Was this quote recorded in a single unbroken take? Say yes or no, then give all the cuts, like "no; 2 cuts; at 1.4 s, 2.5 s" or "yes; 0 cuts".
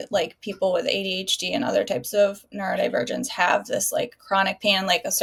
yes; 0 cuts